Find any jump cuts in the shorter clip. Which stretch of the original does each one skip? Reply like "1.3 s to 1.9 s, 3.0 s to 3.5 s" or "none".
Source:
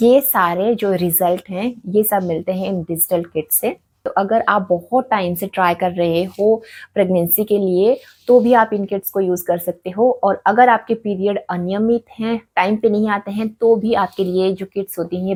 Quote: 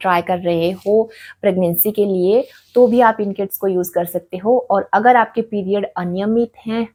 none